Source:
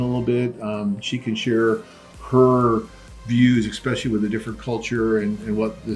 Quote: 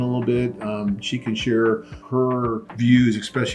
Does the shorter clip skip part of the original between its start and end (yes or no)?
yes